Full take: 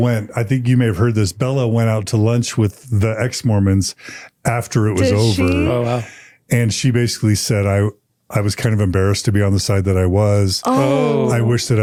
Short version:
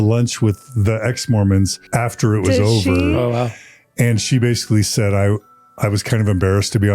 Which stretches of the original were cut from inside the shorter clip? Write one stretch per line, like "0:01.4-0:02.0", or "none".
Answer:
0:03.9-0:04.3